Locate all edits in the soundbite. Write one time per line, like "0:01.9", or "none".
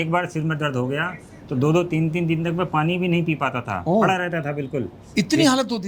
none